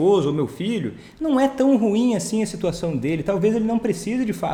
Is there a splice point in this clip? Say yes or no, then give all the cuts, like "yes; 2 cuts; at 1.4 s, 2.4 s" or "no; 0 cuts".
no; 0 cuts